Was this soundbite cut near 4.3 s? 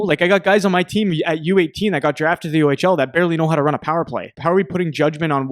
yes; 1 cut; at 4.3 s

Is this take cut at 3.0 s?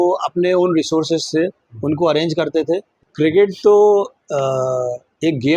yes; 1 cut; at 3.0 s

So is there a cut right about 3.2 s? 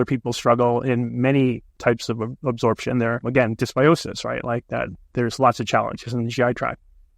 yes; 1 cut; at 3.2 s

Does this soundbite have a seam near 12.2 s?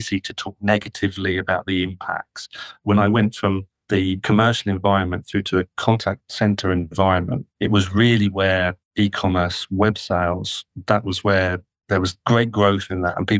no; 5 cuts; at 2.8 s, 3.7 s, 6.0 s, 7.4 s, 8.8 s

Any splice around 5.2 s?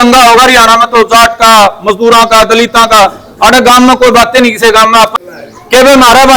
yes; 1 cut; at 5.2 s

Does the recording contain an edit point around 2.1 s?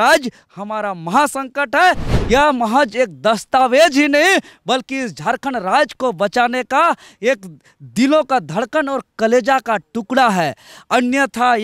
yes; 1 cut; at 2.1 s

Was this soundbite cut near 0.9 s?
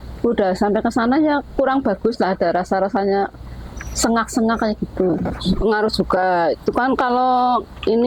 no; 1 cut; at 5.6 s

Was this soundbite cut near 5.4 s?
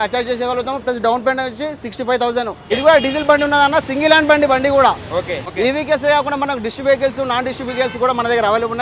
yes; 2 cuts; at 2.6 s, 5.4 s

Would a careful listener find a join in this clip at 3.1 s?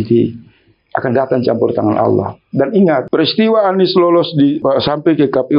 yes; 2 cuts; at 3.1 s, 4.6 s

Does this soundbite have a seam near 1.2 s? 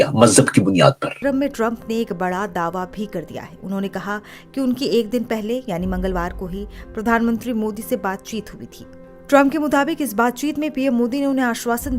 yes; 1 cut; at 1.2 s

